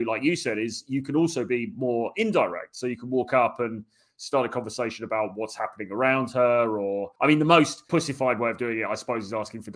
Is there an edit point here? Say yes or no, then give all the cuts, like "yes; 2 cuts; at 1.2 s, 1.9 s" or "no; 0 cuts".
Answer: yes; 2 cuts; at 7.1 s, 7.9 s